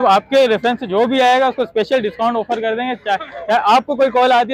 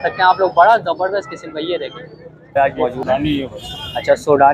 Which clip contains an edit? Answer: second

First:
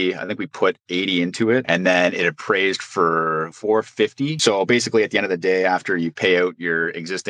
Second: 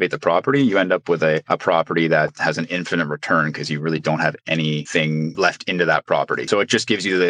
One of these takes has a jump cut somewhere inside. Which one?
first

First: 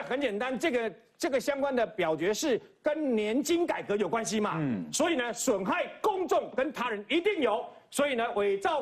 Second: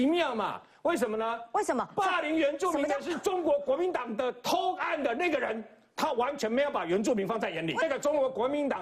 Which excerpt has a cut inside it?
second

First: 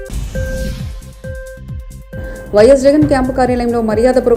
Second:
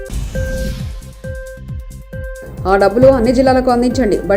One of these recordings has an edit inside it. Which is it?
second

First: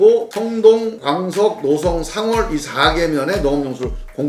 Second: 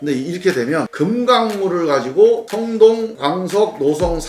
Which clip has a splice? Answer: second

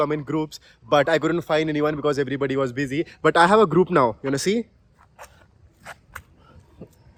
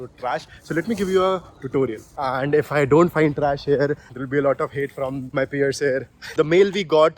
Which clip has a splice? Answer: second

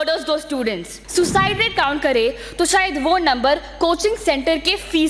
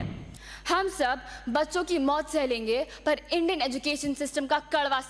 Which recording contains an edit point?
first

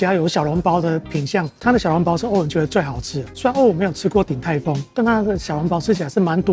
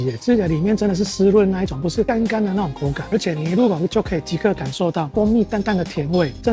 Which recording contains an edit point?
second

